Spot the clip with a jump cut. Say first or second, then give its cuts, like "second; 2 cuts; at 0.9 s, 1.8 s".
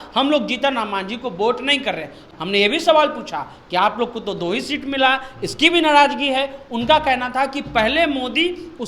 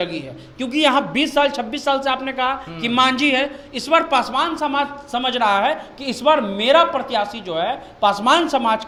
first; 1 cut; at 2.2 s